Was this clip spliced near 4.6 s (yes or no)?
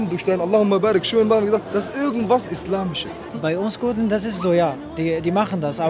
no